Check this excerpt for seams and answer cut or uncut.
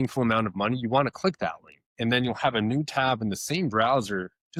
uncut